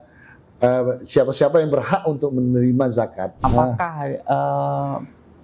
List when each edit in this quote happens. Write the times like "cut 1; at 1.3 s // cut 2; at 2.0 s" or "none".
cut 1; at 3.4 s